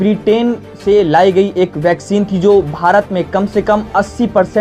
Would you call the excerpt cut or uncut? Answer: uncut